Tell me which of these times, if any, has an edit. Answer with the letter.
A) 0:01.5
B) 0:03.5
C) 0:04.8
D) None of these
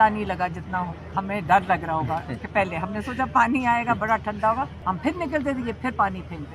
C